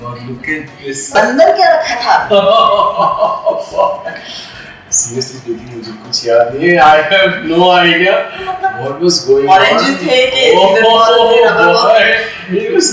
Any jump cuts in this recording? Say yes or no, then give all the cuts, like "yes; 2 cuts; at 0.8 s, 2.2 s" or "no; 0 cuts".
yes; 1 cut; at 1.1 s